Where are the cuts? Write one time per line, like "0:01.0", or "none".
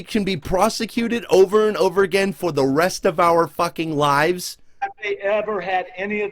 none